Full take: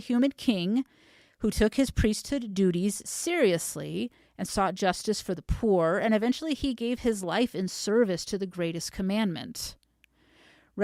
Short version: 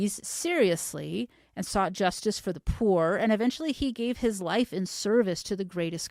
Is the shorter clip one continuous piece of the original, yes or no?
yes